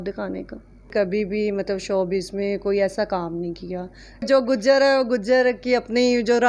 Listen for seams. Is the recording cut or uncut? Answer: cut